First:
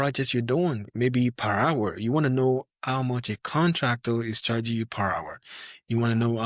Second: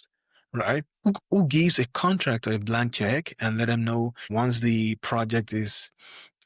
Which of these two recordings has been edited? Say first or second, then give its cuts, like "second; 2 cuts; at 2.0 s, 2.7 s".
second; 2 cuts; at 0.9 s, 4.2 s